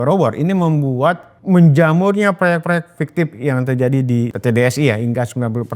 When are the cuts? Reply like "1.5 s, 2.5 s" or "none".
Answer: 1.3 s, 3.0 s, 4.3 s